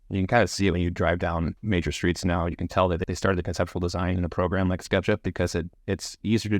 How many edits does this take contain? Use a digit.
2